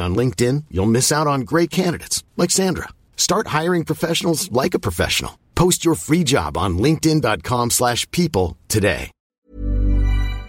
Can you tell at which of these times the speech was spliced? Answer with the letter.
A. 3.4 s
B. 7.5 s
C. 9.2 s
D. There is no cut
C